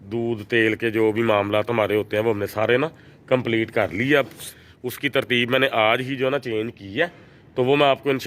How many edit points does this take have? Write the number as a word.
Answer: one